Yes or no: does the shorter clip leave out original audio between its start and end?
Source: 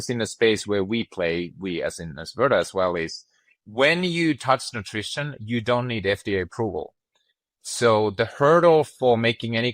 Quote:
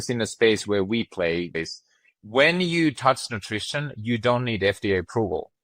yes